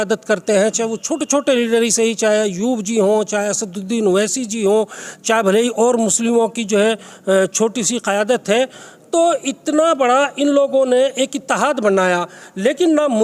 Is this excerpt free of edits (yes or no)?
yes